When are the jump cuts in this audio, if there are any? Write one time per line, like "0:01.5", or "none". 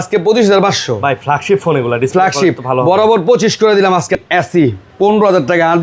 0:04.2